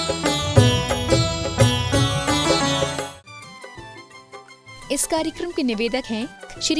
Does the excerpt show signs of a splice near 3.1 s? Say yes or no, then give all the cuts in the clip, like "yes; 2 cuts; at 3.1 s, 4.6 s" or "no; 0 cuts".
yes; 1 cut; at 3.1 s